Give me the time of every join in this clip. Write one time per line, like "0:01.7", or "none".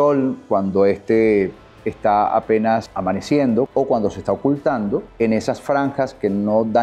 0:02.9
0:03.7
0:05.1